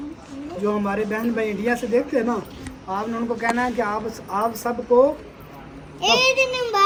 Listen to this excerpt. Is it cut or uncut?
uncut